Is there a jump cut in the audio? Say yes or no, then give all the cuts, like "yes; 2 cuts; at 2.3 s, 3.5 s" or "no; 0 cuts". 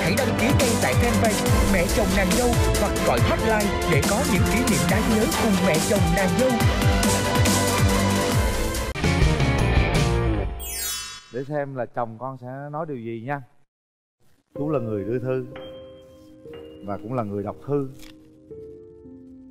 no; 0 cuts